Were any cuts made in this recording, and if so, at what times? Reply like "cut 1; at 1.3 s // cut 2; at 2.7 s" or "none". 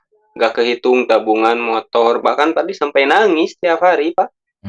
none